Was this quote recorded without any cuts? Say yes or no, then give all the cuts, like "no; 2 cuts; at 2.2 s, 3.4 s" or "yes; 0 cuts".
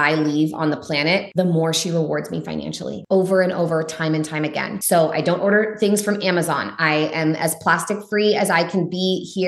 no; 3 cuts; at 1.3 s, 2.9 s, 4.7 s